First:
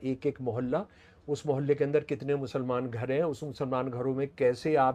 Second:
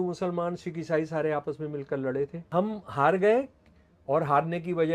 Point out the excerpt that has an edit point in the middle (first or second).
second